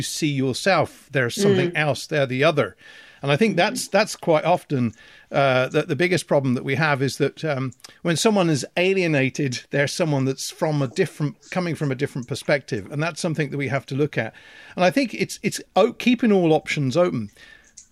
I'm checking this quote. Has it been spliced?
no; 0 cuts

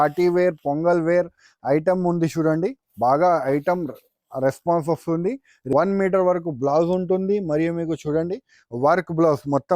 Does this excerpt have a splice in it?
yes; 1 cut; at 5.5 s

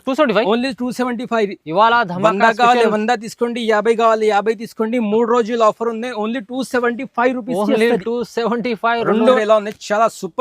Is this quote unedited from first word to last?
no; 1 cut; at 9.4 s

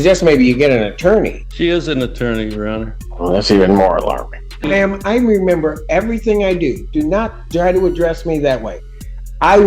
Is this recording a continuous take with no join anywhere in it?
no; 3 cuts; at 1.4 s, 3.0 s, 4.7 s

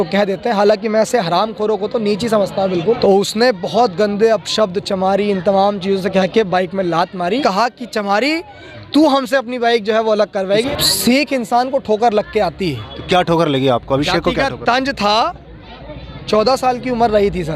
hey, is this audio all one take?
no; 3 cuts; at 3.0 s, 7.4 s, 10.7 s

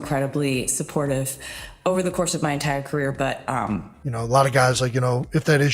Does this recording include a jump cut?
yes; 1 cut; at 4.1 s

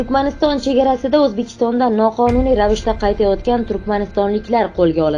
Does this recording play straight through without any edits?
yes; 0 cuts

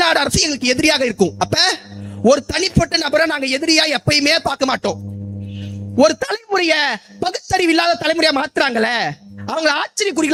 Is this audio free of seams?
yes; 0 cuts

